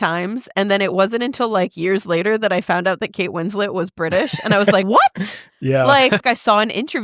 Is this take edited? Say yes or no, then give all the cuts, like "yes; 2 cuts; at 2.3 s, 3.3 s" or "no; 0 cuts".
yes; 2 cuts; at 4.8 s, 6.2 s